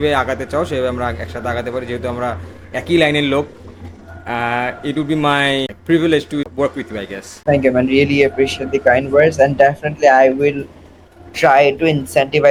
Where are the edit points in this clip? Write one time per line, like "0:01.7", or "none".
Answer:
none